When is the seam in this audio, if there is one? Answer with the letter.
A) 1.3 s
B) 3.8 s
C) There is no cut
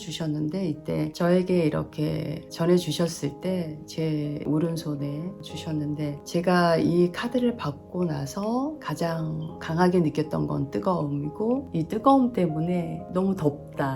C